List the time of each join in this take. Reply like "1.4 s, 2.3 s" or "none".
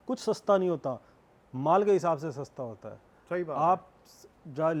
none